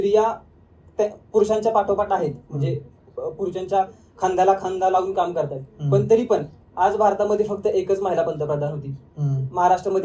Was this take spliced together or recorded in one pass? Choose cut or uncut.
uncut